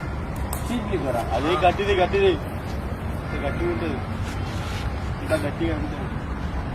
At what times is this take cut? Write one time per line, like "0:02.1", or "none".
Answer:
none